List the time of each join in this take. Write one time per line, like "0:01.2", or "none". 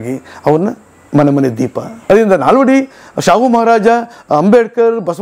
0:01.9